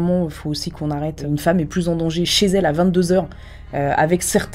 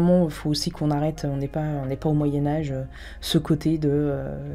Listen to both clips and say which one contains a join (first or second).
first